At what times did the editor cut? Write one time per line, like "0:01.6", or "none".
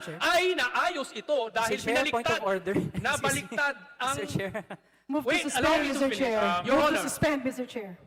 none